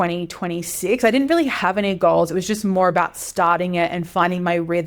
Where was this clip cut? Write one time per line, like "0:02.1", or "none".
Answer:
none